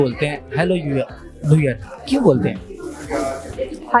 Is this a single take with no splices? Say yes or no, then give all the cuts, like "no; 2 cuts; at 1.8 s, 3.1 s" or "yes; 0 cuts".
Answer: yes; 0 cuts